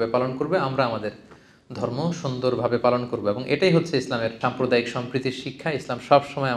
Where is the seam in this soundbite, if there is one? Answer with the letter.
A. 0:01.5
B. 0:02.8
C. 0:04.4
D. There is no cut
C